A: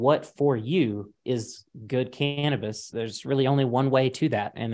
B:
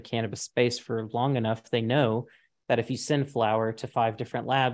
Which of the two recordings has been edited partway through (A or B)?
A